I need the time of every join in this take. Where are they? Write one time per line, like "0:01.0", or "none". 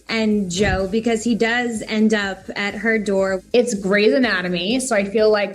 0:03.4